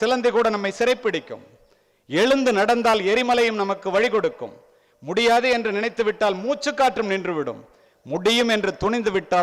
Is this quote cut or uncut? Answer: uncut